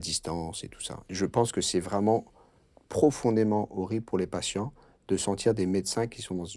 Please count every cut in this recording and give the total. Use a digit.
1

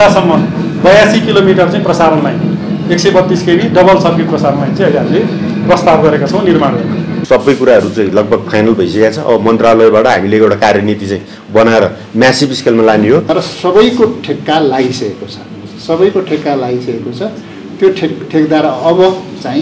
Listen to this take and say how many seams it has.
2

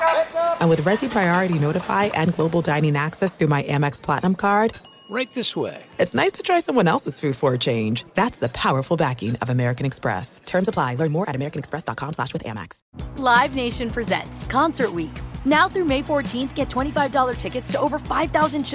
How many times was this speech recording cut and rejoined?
1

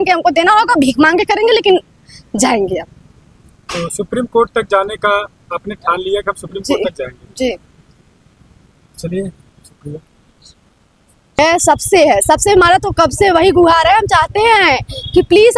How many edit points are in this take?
0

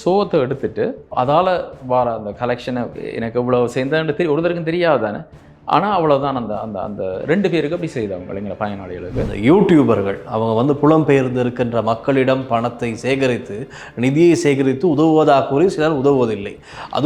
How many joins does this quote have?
2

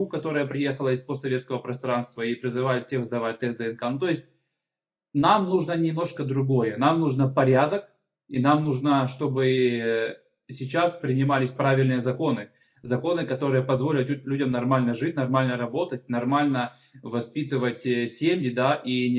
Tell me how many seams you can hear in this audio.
0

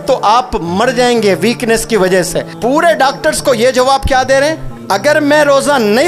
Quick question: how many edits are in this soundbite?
2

